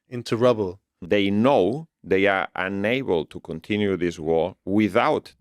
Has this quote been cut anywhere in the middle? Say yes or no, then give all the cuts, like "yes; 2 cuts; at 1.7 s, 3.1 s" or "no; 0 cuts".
yes; 1 cut; at 1.0 s